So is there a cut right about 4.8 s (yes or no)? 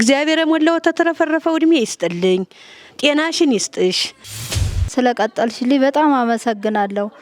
yes